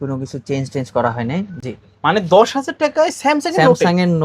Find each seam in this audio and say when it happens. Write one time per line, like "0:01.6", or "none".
0:01.5